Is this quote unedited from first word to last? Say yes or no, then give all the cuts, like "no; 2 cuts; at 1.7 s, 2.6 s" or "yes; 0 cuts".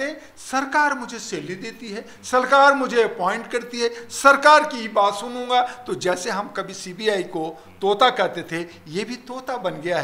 yes; 0 cuts